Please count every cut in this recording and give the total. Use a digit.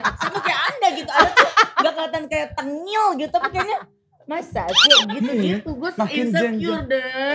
0